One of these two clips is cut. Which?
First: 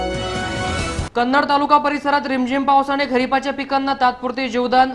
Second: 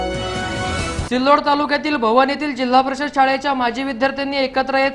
second; 1 cut; at 1.1 s

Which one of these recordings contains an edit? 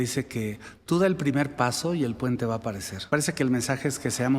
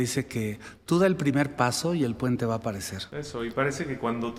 first; 1 cut; at 2.9 s

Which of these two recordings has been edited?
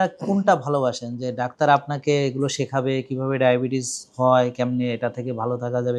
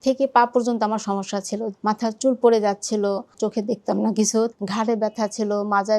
second; 3 cuts; at 1.7 s, 3.3 s, 4.5 s

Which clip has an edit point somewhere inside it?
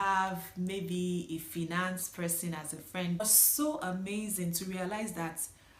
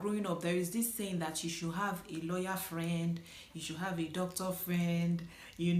first; 1 cut; at 3.2 s

